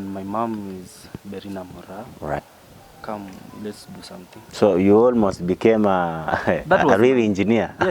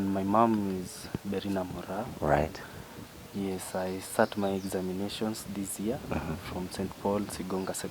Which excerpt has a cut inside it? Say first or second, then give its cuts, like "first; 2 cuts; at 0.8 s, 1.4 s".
first; 1 cut; at 2.4 s